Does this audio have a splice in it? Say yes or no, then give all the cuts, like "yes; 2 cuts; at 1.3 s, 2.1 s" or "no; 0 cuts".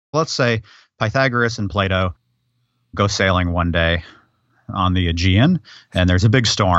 no; 0 cuts